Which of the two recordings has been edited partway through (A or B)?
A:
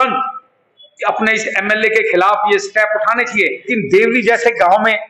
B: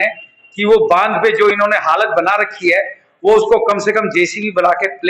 A